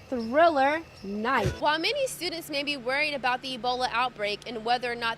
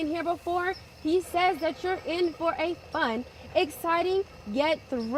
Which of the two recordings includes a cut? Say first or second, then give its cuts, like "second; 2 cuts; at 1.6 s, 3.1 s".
first; 1 cut; at 1.6 s